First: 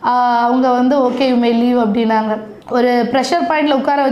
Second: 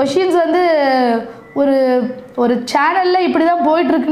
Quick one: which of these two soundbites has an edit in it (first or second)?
first